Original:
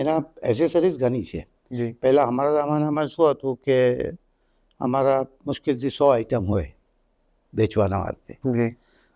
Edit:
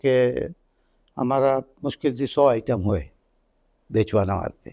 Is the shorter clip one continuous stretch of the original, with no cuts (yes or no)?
yes